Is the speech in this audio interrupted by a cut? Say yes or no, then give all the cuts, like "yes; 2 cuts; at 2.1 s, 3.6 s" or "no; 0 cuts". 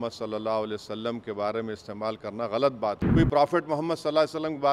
yes; 1 cut; at 3.0 s